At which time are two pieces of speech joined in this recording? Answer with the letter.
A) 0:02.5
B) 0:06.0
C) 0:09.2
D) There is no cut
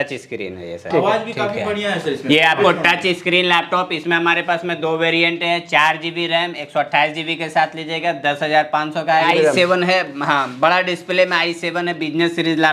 C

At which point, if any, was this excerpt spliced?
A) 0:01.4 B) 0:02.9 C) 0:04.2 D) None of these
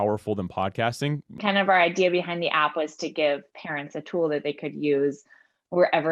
A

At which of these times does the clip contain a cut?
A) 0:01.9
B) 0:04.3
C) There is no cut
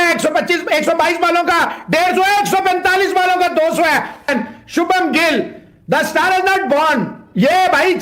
B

